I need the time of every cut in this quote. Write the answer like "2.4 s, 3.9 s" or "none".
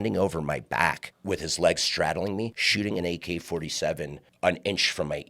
1.1 s, 2.6 s, 4.2 s